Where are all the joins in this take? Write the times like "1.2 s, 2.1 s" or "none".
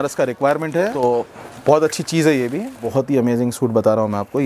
1.0 s, 2.9 s